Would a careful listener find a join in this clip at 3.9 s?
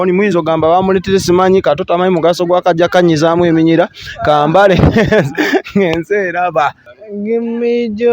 no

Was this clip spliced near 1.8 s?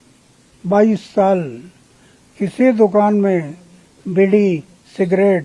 no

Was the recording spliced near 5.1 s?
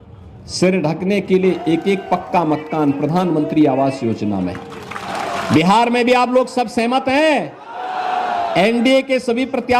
yes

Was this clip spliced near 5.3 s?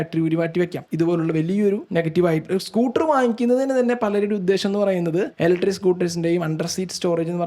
yes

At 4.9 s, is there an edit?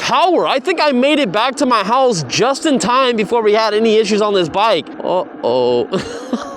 yes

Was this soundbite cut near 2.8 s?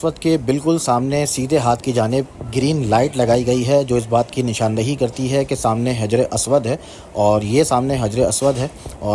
no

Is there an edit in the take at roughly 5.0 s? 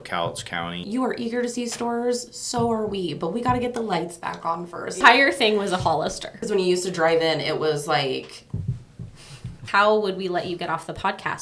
yes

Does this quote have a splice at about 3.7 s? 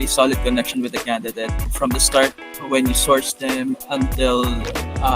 no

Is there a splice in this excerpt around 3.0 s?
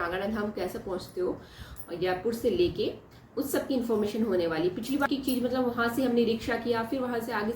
no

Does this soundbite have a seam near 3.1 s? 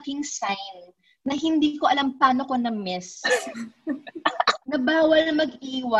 no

